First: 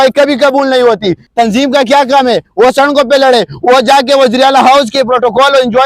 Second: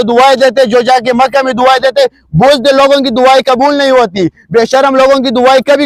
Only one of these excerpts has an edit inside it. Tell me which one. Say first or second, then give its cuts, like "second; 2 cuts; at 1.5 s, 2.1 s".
first; 1 cut; at 1.2 s